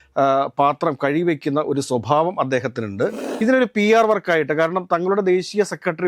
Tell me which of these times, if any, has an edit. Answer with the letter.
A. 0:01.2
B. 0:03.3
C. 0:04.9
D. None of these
B